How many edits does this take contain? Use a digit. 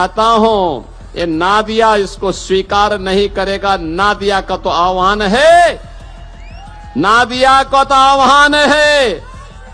0